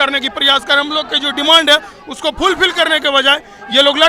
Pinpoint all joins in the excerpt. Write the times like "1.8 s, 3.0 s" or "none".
none